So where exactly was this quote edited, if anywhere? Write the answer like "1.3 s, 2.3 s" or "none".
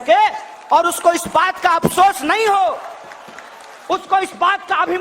none